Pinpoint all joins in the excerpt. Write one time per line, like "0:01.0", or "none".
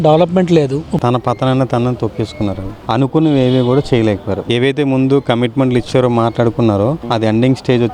0:01.0
0:02.8